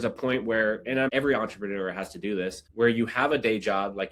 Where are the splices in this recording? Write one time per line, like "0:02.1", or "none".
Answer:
0:01.1
0:02.6